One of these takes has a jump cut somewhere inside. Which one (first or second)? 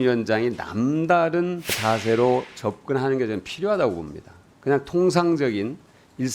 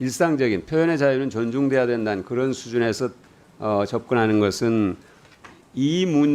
first